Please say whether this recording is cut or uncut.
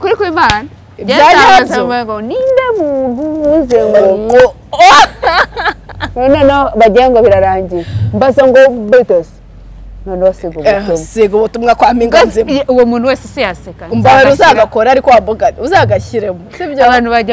uncut